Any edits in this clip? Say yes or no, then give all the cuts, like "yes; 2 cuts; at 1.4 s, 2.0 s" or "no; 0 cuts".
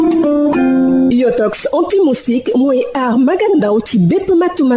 yes; 1 cut; at 1.0 s